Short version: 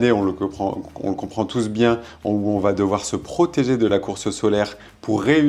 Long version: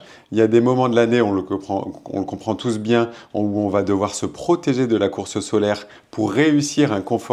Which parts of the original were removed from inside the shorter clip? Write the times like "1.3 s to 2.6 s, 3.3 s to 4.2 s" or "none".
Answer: none